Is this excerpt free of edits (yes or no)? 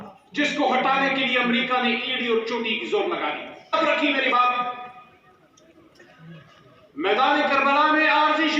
no